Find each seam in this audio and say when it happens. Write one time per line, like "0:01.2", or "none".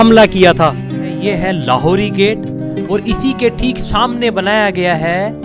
0:01.1